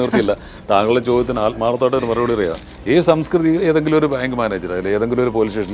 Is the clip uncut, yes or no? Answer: no